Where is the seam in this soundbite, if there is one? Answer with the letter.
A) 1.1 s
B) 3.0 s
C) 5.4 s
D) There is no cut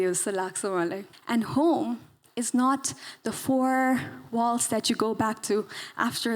A